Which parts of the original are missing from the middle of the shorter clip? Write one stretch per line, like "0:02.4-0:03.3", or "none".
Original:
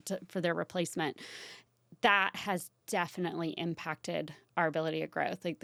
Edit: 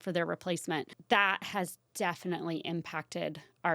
0:01.2-0:01.9